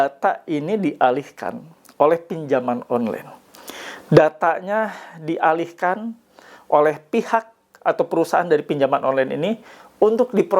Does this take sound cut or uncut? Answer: uncut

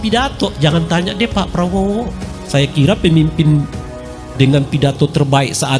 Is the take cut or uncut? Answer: uncut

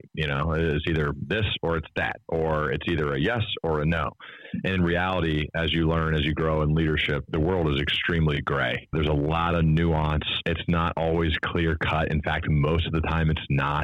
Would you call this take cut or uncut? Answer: cut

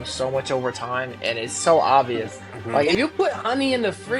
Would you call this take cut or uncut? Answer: cut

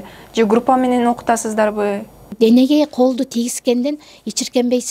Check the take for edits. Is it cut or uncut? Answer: cut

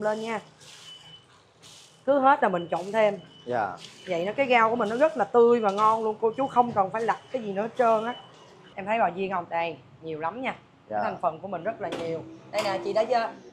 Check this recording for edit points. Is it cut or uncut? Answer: cut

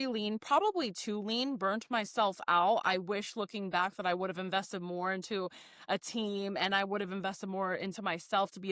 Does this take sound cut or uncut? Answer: uncut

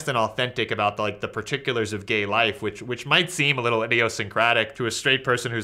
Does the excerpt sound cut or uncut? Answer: cut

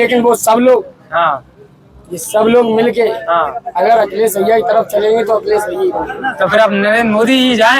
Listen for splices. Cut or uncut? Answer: uncut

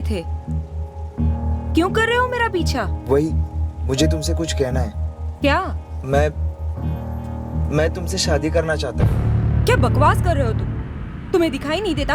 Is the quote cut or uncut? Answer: uncut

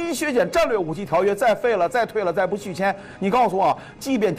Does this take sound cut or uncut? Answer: uncut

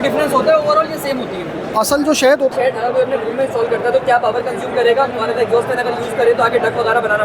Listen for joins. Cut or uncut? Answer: cut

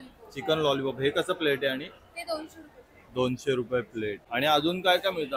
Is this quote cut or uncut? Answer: uncut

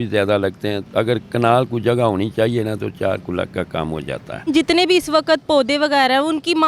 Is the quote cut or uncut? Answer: cut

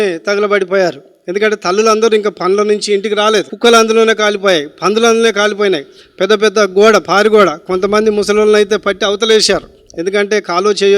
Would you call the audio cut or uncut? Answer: cut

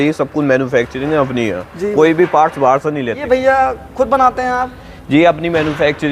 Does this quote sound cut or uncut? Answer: cut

